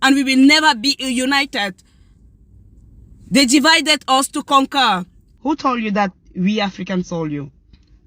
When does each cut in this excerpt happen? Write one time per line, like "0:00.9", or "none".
0:05.3

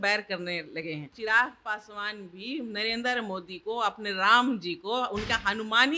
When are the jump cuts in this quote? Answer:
0:01.1

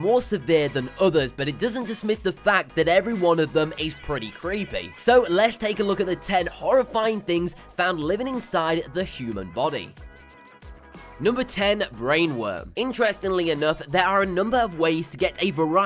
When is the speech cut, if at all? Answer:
0:01.4

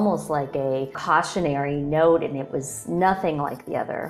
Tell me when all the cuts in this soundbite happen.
0:01.0

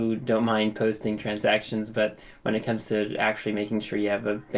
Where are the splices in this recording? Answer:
none

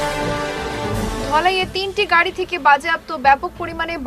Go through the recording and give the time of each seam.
0:01.1

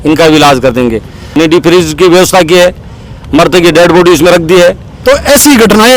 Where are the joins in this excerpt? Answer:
0:01.2
0:04.9

